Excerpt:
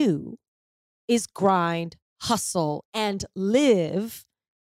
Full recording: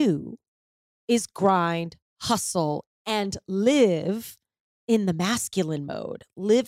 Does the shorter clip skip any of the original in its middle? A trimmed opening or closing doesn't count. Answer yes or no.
yes